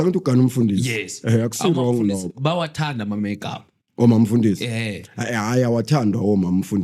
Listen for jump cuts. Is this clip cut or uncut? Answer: uncut